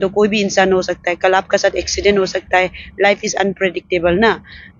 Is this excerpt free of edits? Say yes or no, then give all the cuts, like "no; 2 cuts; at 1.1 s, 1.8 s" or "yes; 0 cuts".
yes; 0 cuts